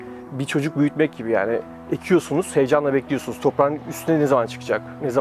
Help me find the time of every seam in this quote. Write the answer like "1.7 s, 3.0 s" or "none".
none

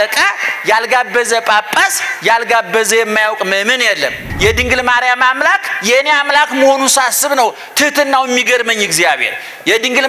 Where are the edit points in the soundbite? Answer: 4.2 s

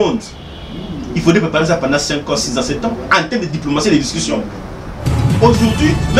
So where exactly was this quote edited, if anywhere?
5.2 s

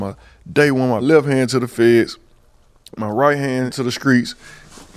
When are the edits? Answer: 1.0 s, 3.9 s

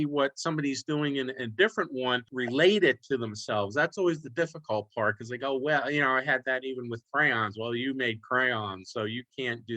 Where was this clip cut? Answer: 2.3 s

